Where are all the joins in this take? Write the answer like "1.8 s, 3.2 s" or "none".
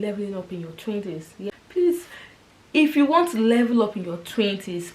1.3 s